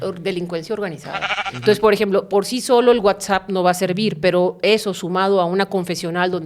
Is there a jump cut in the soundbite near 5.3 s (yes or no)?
no